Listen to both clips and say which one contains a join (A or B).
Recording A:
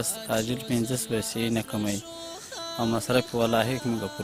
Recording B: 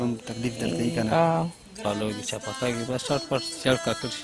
B